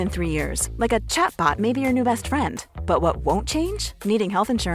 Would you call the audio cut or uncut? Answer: uncut